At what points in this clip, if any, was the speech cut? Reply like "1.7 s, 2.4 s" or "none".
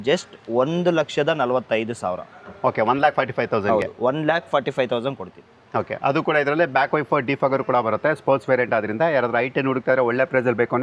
none

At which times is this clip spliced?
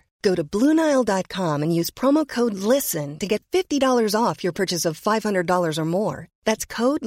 none

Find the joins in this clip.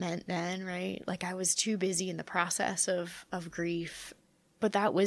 4.0 s

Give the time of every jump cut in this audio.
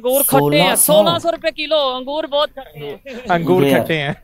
none

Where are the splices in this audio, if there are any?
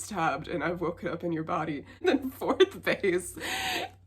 2.0 s

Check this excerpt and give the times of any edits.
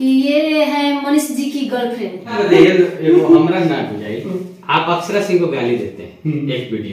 2.4 s

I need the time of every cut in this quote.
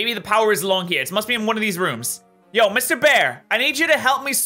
none

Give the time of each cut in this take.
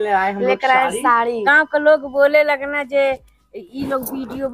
1.3 s

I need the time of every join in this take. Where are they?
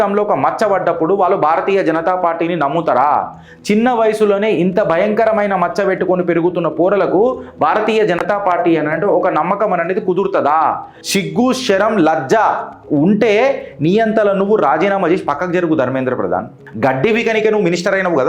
10.9 s, 16.6 s

